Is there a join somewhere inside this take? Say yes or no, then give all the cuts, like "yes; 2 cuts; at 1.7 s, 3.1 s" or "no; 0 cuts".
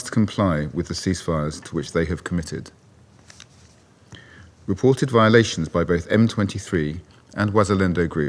no; 0 cuts